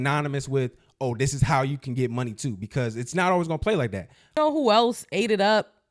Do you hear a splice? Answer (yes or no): yes